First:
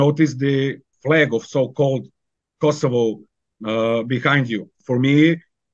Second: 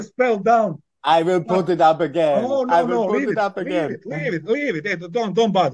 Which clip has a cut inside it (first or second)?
first